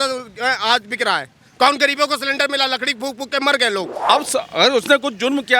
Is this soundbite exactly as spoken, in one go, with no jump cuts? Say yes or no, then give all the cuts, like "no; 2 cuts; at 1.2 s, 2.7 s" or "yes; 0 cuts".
no; 1 cut; at 4.1 s